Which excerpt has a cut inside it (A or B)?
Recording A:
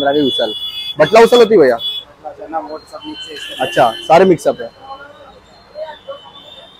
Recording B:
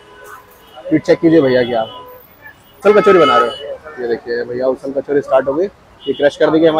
B